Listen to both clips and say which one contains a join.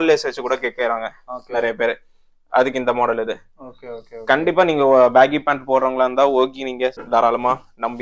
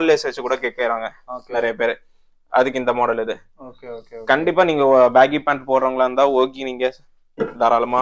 first; 1 cut; at 7.0 s

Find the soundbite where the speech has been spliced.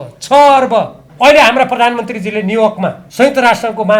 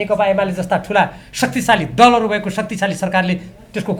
first; 2 cuts; at 1.0 s, 3.0 s

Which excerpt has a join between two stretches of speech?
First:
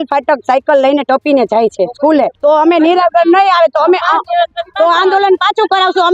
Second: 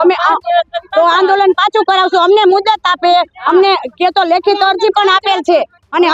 first; 1 cut; at 2.4 s

